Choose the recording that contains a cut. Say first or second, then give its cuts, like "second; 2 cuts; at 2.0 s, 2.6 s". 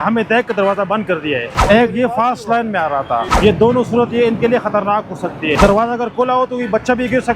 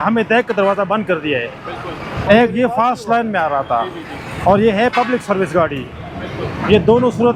first; 3 cuts; at 1.5 s, 3.3 s, 5.6 s